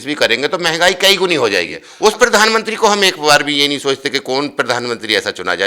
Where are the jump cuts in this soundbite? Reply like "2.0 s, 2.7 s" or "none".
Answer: 1.8 s